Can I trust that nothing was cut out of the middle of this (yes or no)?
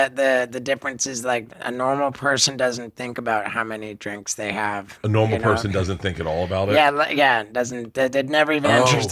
yes